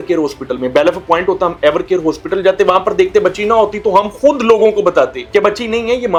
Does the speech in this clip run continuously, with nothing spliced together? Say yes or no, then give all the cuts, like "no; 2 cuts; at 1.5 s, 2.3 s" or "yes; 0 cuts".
yes; 0 cuts